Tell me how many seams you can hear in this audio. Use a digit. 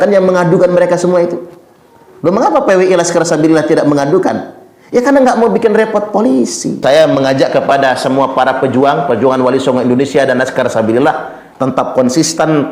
2